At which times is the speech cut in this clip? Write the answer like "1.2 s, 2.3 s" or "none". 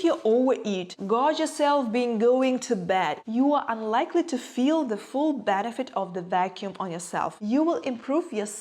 0.9 s, 3.2 s, 7.4 s